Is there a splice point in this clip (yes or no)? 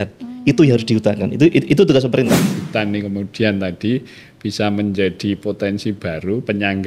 yes